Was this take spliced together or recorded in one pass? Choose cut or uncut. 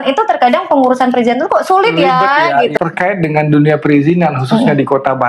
cut